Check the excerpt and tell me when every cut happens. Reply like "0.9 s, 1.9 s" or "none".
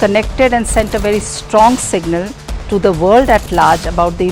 none